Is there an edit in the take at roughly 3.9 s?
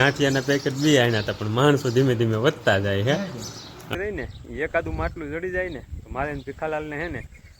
yes; 1 cut; at 3.9 s

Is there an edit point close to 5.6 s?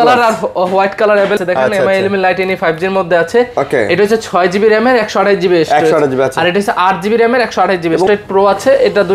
no; 2 cuts; at 1.4 s, 8.1 s

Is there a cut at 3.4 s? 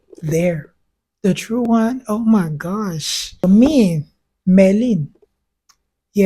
yes; 1 cut; at 3.4 s

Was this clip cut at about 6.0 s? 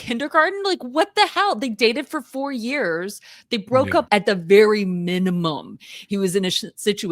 no; 1 cut; at 4.1 s

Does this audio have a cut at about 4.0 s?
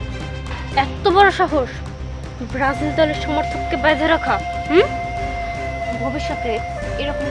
no; 0 cuts

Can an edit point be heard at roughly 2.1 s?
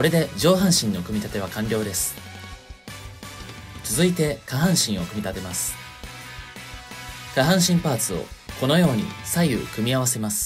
no; 0 cuts

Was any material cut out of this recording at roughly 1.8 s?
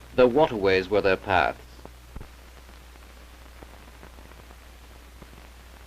yes; 1 cut; at 1.8 s

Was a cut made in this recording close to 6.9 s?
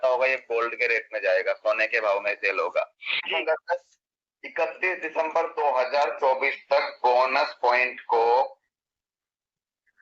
no; 1 cut; at 3.3 s

